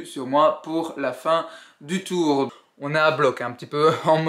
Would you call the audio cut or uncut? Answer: cut